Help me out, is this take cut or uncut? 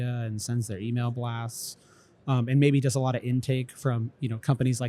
uncut